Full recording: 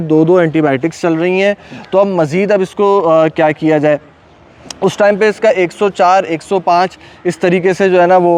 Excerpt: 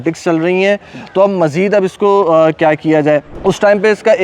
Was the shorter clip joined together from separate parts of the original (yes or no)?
yes